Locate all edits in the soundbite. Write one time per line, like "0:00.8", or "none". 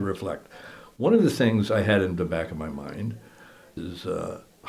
0:03.7